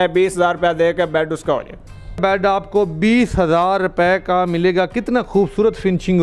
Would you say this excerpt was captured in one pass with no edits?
no; 1 cut; at 2.2 s

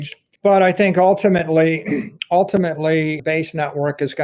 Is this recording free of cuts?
no; 2 cuts; at 2.1 s, 3.2 s

